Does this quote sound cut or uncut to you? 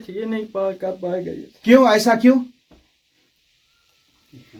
uncut